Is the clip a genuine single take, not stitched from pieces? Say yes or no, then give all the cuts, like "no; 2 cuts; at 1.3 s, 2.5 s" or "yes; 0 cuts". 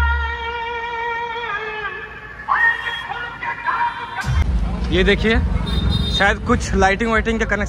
no; 1 cut; at 4.4 s